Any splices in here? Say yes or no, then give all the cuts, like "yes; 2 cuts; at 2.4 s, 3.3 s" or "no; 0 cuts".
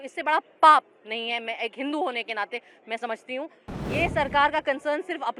yes; 1 cut; at 3.7 s